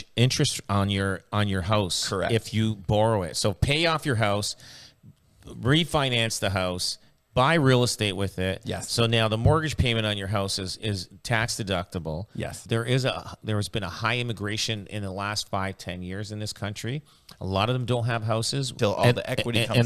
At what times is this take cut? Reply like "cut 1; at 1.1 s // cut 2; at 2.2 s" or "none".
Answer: cut 1; at 12.6 s // cut 2; at 18.7 s